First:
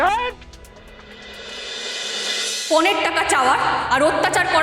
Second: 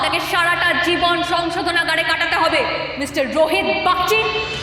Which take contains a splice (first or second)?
first